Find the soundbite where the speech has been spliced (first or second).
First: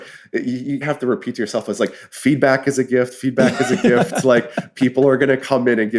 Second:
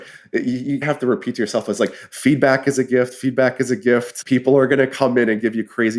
second